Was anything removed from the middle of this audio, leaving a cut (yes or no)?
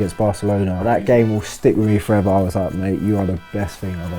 yes